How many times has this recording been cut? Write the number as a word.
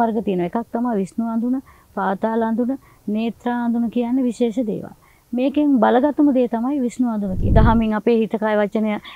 one